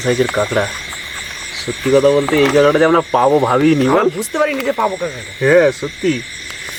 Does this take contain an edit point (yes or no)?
no